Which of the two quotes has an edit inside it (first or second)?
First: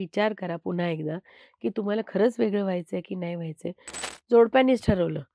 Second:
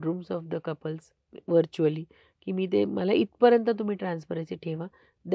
first